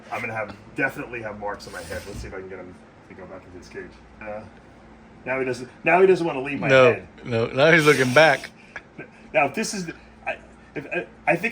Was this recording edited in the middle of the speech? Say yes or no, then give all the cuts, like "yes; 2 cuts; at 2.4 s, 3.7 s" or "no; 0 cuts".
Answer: yes; 1 cut; at 4.2 s